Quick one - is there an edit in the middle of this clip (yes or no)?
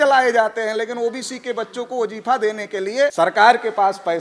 yes